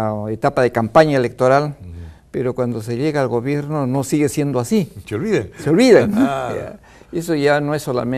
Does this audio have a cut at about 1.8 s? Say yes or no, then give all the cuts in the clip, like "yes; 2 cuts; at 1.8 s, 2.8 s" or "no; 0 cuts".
yes; 1 cut; at 1.8 s